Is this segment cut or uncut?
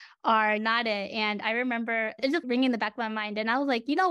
cut